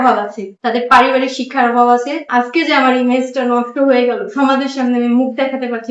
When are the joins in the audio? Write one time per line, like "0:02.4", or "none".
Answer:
0:02.2

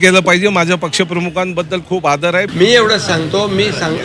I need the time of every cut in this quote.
0:02.5

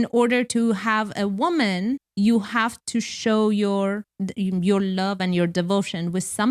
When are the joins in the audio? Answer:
0:02.1
0:04.1

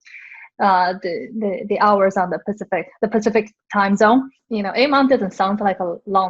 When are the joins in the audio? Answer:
0:04.4

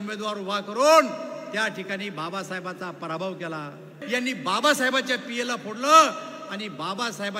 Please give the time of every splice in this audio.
0:03.9

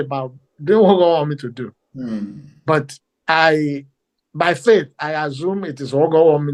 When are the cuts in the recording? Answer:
none

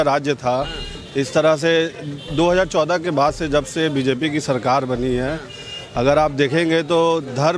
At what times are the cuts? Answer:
none

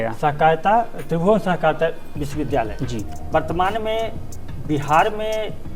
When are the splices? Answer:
0:03.1

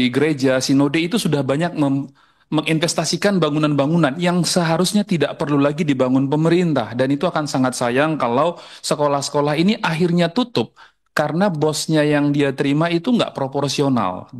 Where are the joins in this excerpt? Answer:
none

